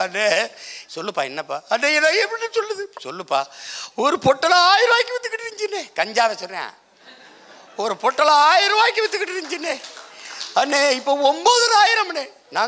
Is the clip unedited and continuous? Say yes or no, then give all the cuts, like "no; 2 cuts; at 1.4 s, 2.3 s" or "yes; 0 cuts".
yes; 0 cuts